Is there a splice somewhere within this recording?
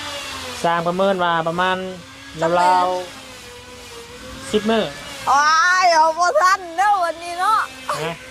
no; 0 cuts

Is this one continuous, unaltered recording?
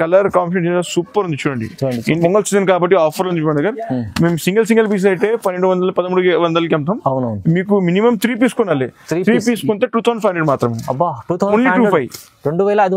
no; 1 cut; at 2.2 s

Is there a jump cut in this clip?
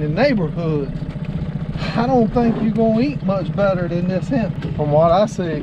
yes; 1 cut; at 4.6 s

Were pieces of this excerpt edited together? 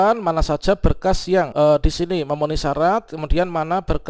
yes; 1 cut; at 1.5 s

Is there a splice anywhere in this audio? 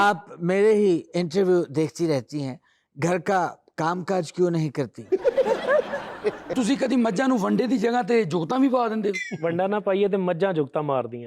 yes; 1 cut; at 6.5 s

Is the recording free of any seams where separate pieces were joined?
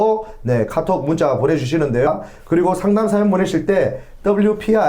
no; 1 cut; at 2.1 s

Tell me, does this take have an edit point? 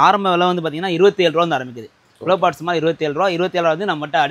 no; 0 cuts

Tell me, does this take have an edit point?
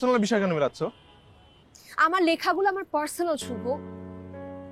yes; 1 cut; at 3.8 s

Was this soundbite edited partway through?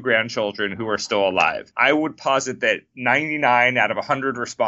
yes; 1 cut; at 1.7 s

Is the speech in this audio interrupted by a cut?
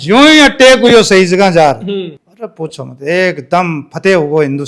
no; 0 cuts

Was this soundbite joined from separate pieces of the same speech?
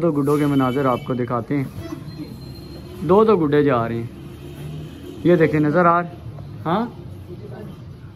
no; 0 cuts

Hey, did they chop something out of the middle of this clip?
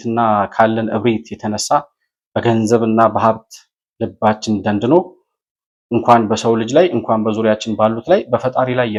no; 0 cuts

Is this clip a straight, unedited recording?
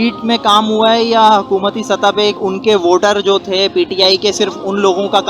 no; 1 cut; at 2.4 s

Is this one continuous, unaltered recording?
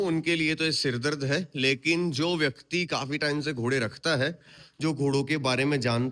yes; 0 cuts

